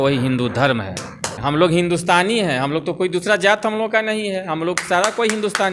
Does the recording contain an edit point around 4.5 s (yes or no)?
no